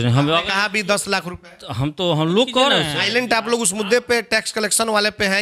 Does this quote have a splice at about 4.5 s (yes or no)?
no